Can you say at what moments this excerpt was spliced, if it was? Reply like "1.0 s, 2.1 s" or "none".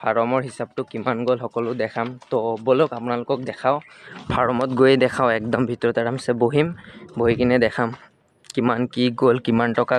none